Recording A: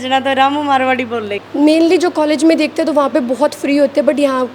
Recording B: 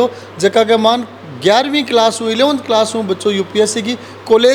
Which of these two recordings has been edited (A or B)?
A